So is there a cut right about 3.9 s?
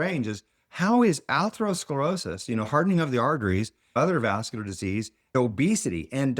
yes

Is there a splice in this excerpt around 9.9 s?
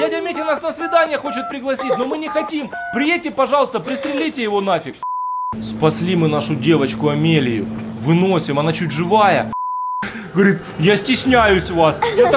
yes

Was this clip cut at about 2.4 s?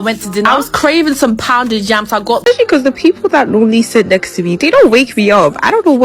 yes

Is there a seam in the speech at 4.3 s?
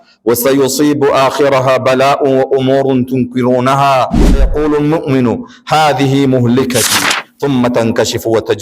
yes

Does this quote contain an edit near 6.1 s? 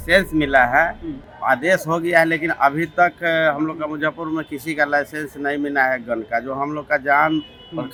no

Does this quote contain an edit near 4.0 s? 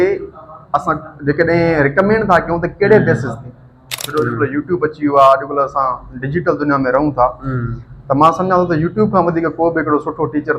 yes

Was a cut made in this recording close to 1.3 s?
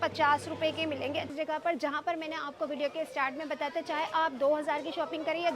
yes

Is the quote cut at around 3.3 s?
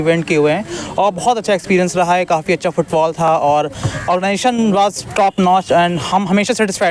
no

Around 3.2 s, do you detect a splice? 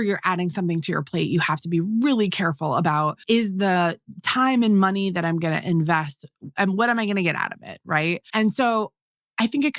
yes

